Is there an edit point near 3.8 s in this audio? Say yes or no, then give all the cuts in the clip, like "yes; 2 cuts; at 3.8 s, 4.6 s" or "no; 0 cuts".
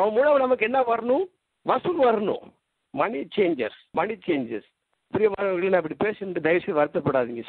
yes; 1 cut; at 3.8 s